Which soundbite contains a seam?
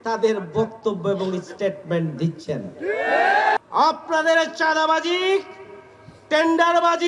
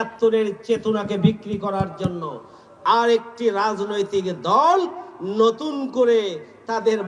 first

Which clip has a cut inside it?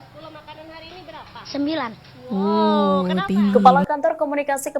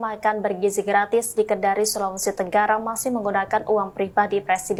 first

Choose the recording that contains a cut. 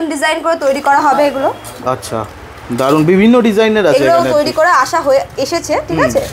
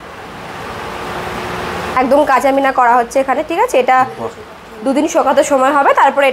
second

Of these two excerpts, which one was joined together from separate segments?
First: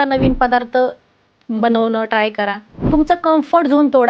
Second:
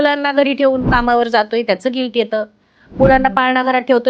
first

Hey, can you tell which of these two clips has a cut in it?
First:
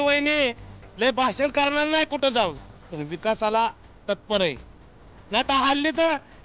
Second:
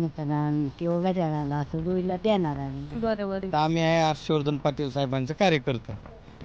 second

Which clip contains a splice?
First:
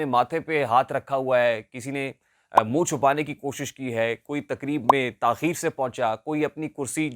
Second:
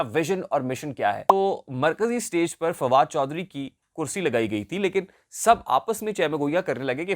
second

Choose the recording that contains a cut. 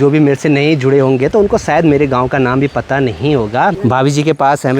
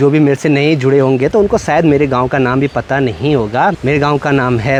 first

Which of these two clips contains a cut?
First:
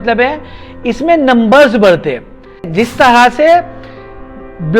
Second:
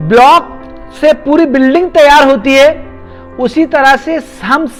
first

